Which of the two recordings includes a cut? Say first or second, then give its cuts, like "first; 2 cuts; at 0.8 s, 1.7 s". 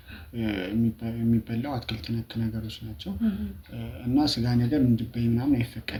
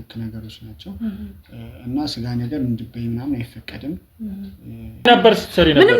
second; 1 cut; at 5.1 s